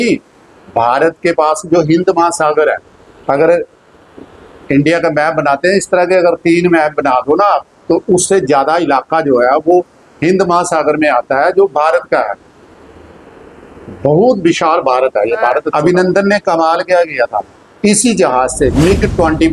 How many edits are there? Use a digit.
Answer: 1